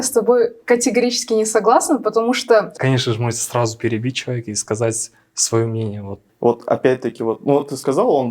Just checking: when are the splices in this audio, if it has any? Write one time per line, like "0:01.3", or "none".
0:02.7
0:06.2